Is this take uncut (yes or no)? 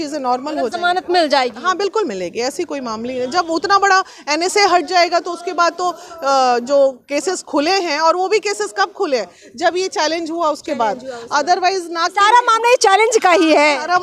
yes